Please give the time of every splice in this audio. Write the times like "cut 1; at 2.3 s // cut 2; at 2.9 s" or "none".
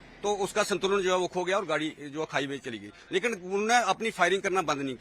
none